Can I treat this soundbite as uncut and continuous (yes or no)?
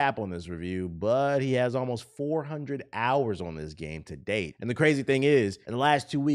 yes